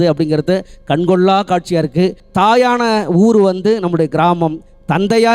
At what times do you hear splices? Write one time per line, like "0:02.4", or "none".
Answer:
0:02.2